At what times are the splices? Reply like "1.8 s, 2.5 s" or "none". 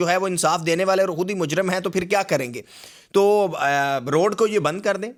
none